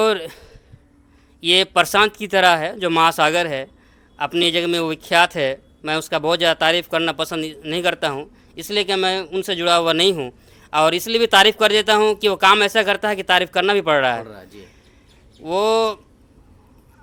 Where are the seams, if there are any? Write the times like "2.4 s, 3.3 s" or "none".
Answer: none